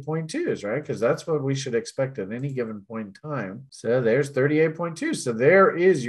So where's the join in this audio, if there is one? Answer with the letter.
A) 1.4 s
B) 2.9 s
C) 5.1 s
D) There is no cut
D